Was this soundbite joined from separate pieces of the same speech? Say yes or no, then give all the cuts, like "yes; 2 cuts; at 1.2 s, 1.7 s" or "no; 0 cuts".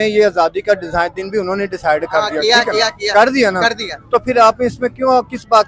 no; 0 cuts